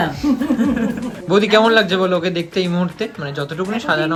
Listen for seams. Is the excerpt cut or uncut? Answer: uncut